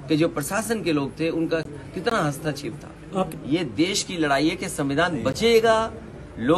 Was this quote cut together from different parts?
yes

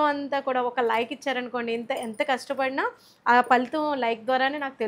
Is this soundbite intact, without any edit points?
yes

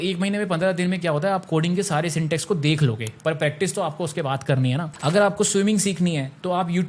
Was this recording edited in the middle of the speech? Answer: yes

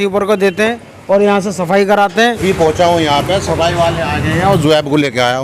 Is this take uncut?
no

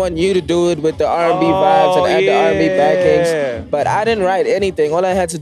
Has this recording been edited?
no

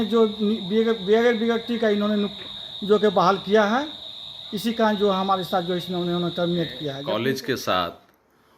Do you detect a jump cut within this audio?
yes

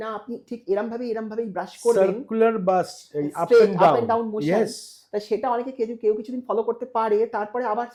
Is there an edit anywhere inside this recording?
no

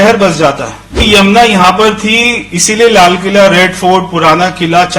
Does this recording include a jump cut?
yes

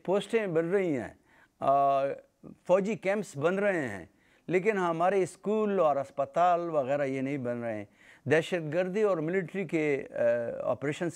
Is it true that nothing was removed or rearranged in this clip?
yes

